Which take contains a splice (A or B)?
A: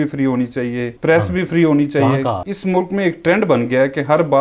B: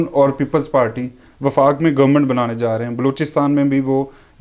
A